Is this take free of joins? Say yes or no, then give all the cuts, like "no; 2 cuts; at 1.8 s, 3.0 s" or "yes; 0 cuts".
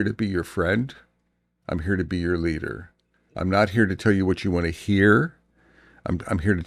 yes; 0 cuts